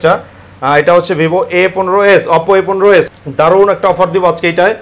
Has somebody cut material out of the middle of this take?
yes; 1 cut; at 3.1 s

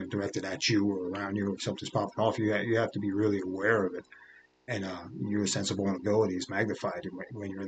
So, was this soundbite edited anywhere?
no; 0 cuts

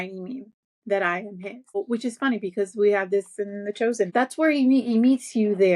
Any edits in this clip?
yes; 2 cuts; at 1.8 s, 4.1 s

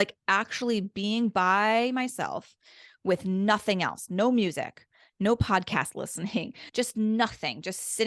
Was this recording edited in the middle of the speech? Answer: yes; 1 cut; at 6.6 s

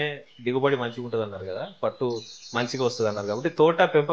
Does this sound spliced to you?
no; 0 cuts

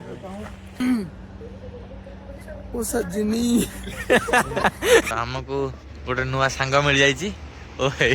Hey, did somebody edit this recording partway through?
yes; 2 cuts; at 0.8 s, 5.1 s

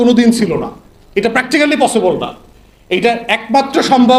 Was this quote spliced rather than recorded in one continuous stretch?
no; 0 cuts

